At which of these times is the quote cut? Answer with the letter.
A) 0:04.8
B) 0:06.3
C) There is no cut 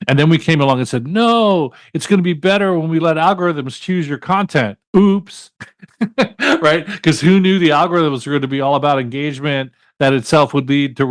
A